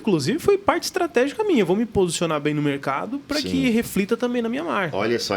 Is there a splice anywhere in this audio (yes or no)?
no